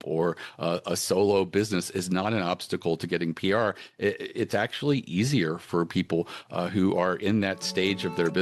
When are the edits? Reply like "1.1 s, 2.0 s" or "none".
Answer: none